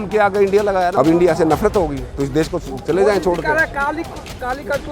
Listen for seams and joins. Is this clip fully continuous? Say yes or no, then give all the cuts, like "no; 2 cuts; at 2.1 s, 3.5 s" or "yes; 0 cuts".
no; 1 cut; at 0.9 s